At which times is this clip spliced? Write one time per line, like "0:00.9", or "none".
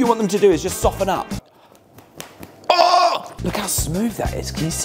0:01.5
0:03.3